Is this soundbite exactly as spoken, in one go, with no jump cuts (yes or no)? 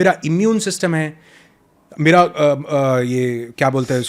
yes